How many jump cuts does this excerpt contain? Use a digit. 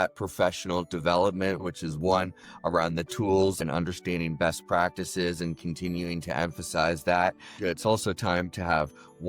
3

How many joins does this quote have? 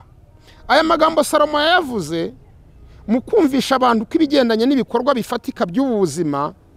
0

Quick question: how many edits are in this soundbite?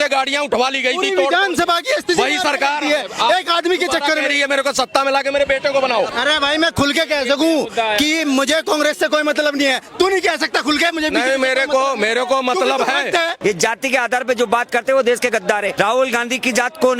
3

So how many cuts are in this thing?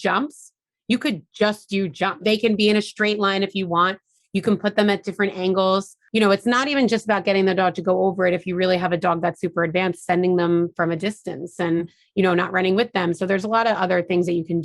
2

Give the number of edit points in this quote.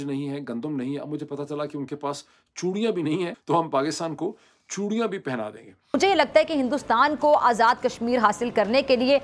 2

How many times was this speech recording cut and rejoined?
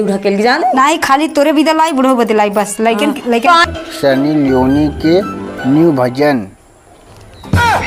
1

